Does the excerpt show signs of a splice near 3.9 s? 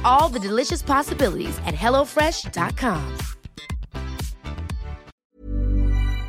no; 1 cut; at 5.1 s

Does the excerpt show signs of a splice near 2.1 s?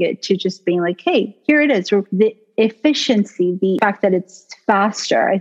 yes; 2 cuts; at 2.1 s, 3.8 s

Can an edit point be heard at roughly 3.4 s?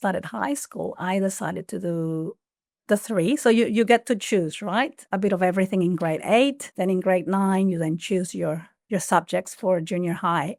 no; 0 cuts

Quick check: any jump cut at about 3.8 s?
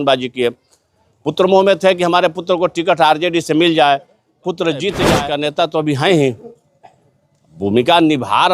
no; 1 cut; at 5.1 s

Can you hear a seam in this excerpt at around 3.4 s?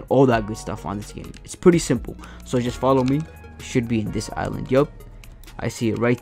yes; 1 cut; at 3.4 s

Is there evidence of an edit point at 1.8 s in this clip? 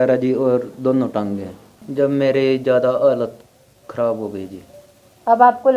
yes; 1 cut; at 1.8 s

